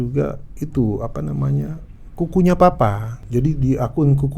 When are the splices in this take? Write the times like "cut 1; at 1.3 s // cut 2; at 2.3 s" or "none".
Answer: cut 1; at 3.1 s